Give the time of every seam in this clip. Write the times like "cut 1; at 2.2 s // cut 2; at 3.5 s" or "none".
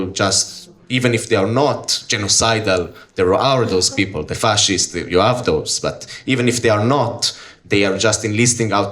none